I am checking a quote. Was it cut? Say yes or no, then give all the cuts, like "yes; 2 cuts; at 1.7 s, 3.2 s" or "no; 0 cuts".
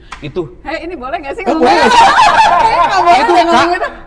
no; 0 cuts